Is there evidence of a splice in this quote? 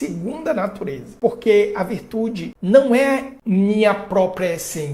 yes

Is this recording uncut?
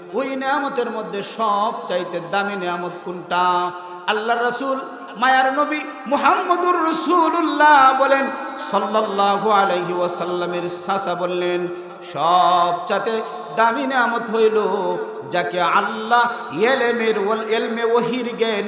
yes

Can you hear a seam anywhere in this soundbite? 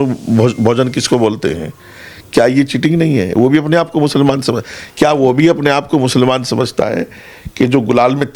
no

